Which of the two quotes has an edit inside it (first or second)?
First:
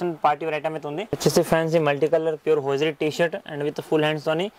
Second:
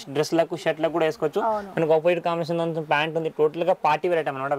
first